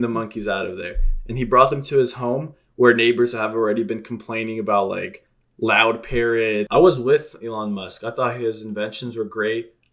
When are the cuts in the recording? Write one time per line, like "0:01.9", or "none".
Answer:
0:06.7